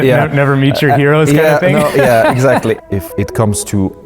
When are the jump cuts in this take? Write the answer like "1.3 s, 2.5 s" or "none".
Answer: 2.8 s